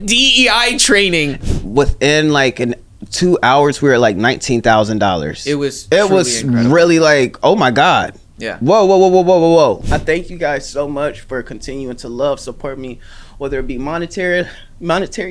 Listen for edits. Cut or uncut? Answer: cut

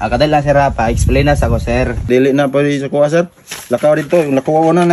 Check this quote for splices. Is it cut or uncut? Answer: cut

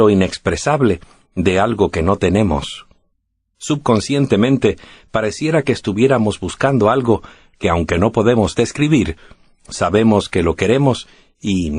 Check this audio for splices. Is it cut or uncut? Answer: cut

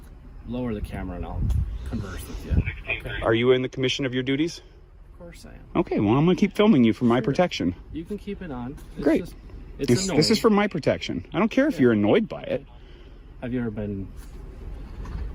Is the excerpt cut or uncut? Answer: uncut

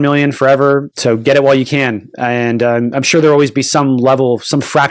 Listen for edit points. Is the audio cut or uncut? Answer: uncut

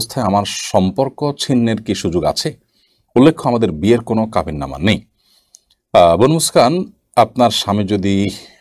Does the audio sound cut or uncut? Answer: uncut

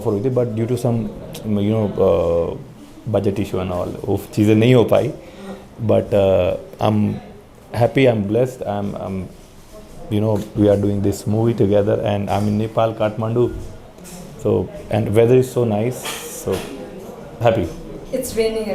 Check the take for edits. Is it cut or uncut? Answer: uncut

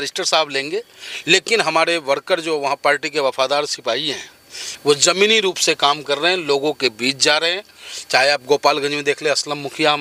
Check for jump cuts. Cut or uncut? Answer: uncut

